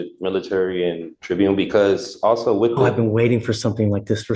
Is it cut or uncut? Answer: cut